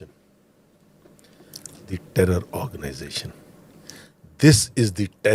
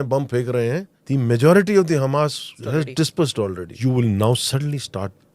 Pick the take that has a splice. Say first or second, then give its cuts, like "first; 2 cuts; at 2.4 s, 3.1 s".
second; 3 cuts; at 0.9 s, 2.5 s, 3.7 s